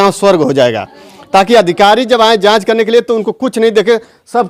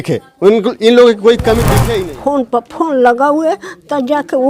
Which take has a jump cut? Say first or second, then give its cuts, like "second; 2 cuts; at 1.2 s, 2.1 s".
second; 1 cut; at 1.8 s